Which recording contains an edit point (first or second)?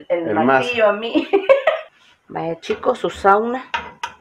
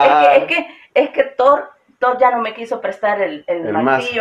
first